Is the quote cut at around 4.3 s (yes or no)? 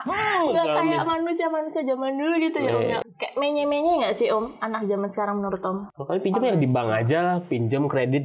no